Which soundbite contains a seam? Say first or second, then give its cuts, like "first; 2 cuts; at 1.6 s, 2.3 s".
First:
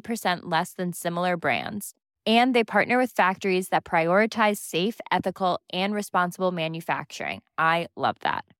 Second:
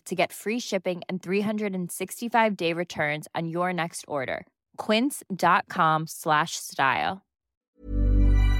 second; 1 cut; at 7.4 s